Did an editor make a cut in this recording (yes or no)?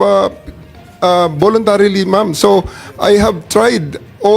no